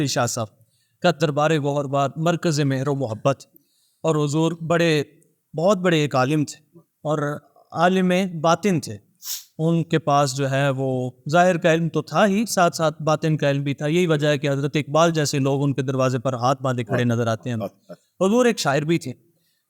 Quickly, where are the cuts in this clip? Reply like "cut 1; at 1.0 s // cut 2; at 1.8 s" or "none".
none